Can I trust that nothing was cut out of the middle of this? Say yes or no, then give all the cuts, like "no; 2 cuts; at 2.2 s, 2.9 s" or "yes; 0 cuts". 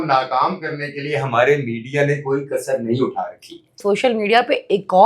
no; 1 cut; at 3.8 s